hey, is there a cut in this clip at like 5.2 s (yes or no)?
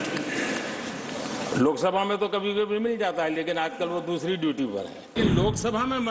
yes